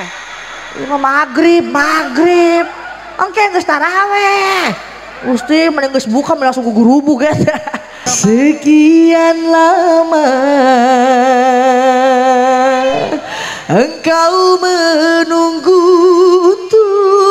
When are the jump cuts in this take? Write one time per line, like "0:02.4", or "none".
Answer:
0:08.0